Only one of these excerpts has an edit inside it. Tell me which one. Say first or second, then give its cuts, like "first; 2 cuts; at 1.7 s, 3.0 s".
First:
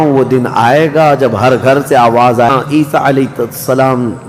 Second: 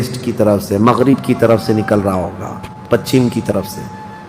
first; 1 cut; at 2.5 s